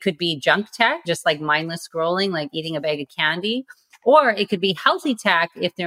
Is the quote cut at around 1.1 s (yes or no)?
yes